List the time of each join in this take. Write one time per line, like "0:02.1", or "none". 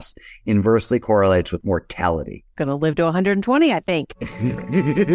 none